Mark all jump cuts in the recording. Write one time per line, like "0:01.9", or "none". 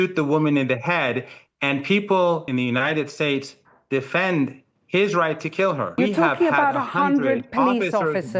0:02.4
0:05.9